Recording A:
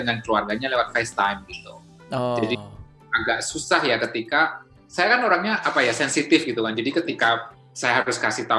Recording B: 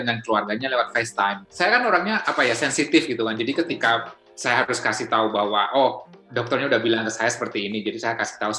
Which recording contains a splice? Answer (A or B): B